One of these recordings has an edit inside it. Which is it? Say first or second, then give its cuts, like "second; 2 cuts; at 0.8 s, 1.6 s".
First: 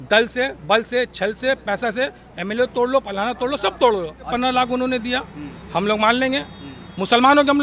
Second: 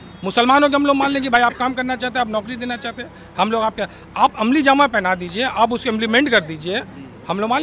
first; 1 cut; at 4.3 s